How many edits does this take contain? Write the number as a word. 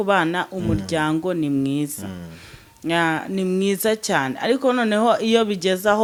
zero